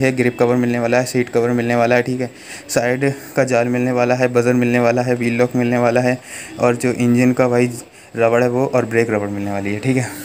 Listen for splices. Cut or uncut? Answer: uncut